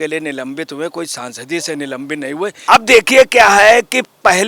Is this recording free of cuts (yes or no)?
no